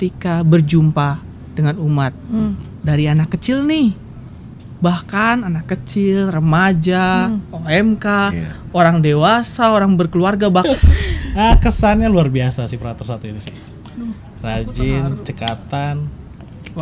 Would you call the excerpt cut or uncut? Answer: cut